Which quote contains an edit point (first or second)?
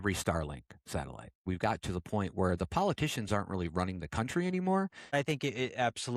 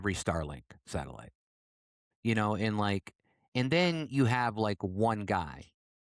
first